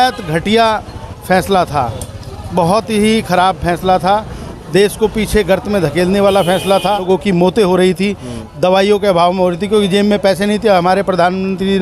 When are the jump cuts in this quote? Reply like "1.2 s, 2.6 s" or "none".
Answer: 7.0 s

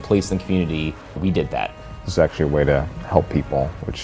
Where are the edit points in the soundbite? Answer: 1.4 s

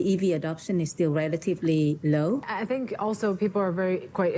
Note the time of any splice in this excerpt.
2.5 s

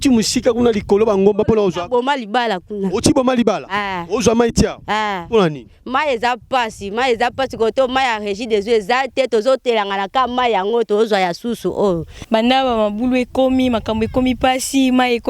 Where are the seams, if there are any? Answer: 12.1 s

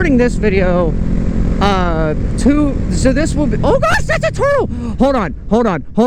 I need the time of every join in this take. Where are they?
none

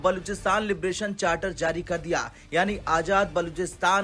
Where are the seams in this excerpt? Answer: none

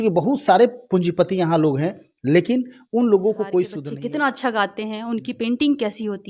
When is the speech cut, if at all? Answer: 3.8 s

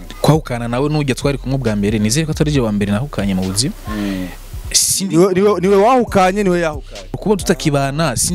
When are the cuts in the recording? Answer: 7.2 s

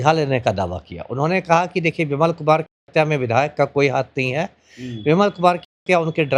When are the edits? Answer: none

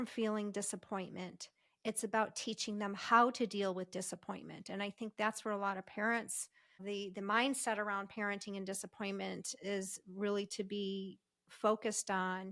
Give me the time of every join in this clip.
6.8 s

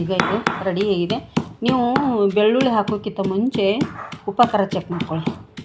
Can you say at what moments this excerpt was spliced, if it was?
none

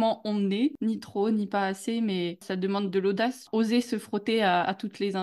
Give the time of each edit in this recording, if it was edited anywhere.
0.8 s, 2.5 s, 3.4 s

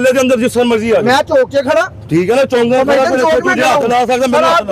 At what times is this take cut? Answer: none

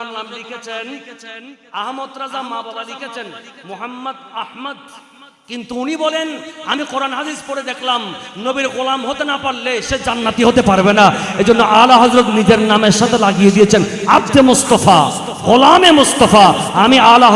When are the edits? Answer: none

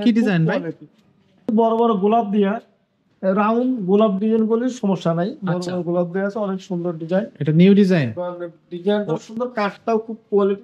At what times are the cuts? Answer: 1.5 s

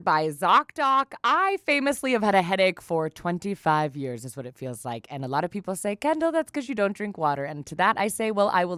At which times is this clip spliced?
none

